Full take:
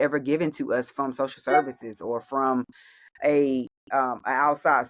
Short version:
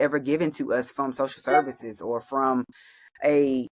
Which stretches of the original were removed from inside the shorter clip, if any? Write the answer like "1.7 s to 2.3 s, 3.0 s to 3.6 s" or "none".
none